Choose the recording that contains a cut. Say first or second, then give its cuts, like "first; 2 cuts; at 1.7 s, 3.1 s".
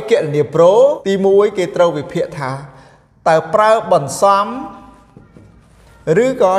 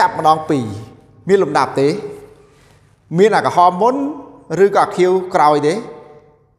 first; 1 cut; at 1.0 s